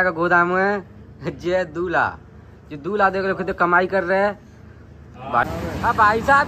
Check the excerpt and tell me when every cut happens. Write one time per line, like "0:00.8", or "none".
0:05.4